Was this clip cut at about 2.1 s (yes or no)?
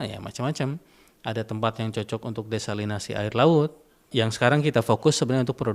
no